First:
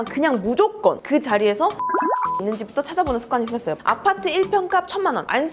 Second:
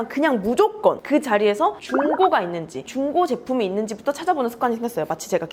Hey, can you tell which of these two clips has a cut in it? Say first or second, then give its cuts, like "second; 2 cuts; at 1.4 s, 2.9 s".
first; 2 cuts; at 2.1 s, 3.8 s